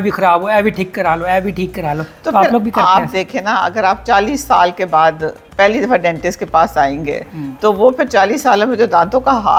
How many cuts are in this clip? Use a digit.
0